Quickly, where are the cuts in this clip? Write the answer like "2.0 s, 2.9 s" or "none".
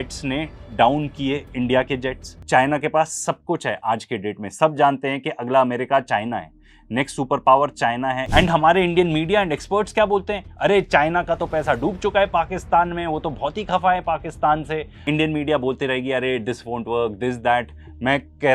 2.4 s, 8.2 s, 15.0 s